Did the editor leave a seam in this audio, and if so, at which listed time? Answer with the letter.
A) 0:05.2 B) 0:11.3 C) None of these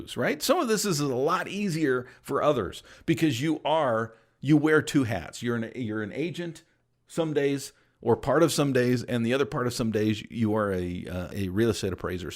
B